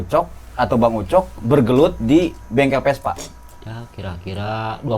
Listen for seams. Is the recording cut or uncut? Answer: uncut